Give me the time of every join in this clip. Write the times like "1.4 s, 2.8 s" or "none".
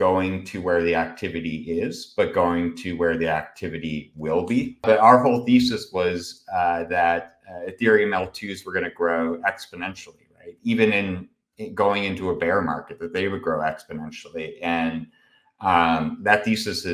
4.8 s

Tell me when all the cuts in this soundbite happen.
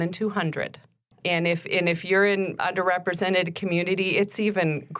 1.1 s

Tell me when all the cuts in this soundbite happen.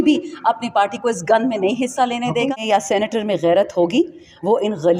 2.5 s

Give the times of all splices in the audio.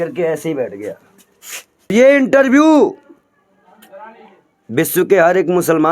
1.9 s

